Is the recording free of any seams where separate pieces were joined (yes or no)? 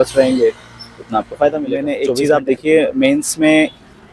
no